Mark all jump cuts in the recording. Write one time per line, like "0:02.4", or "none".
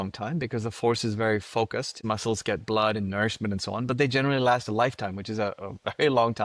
0:02.0